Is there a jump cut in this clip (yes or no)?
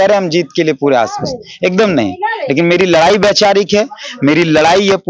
no